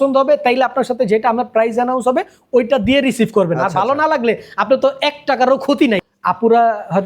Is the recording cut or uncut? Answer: cut